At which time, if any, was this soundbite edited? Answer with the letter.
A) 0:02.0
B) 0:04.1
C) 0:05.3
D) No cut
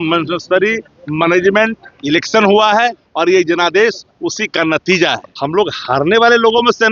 C